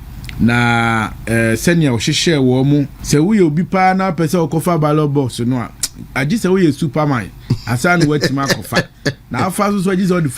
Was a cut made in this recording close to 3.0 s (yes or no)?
yes